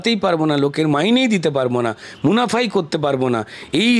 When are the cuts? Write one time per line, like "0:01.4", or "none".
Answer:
none